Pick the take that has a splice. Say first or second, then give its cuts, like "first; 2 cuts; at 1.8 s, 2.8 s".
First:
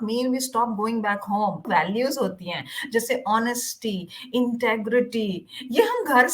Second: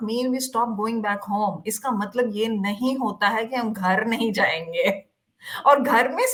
first; 1 cut; at 1.6 s